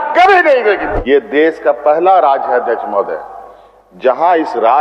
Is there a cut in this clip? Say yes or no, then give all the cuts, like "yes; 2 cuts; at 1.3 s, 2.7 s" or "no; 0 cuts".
yes; 1 cut; at 0.9 s